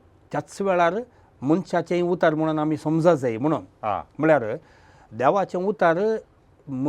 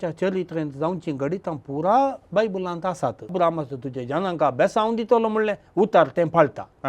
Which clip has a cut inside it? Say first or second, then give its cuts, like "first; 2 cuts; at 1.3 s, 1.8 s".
second; 1 cut; at 3.3 s